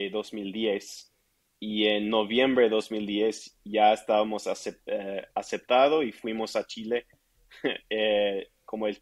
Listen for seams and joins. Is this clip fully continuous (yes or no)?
yes